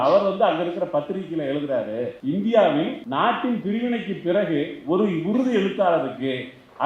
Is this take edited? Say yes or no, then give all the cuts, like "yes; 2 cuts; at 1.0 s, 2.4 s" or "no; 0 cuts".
yes; 2 cuts; at 2.2 s, 3.0 s